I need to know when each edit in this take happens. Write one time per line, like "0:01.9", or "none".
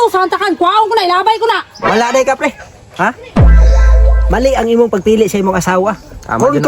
0:01.7